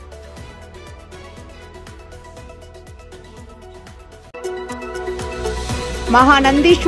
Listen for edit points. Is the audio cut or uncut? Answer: cut